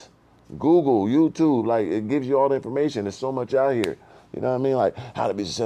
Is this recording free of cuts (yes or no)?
yes